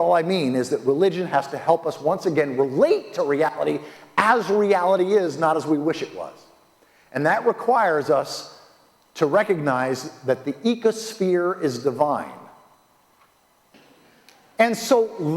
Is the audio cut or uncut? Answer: cut